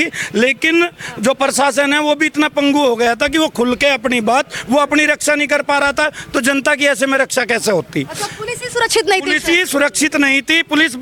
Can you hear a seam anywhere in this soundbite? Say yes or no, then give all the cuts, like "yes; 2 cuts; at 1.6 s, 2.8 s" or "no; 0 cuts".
no; 0 cuts